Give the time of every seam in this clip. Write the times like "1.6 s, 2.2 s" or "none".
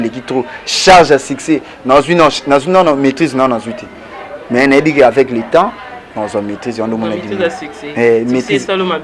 none

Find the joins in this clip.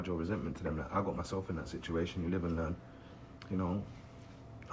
2.2 s

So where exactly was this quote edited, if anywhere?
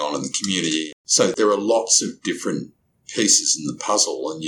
1.3 s

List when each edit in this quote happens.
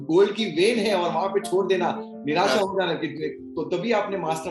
none

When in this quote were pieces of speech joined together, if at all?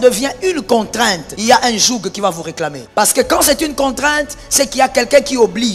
1.3 s, 2.8 s

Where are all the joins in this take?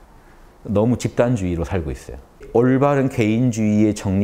2.5 s

